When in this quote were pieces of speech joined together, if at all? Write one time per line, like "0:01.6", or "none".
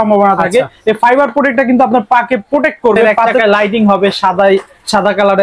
0:03.2